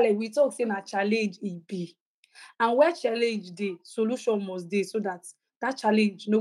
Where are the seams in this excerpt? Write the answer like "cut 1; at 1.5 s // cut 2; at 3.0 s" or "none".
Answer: none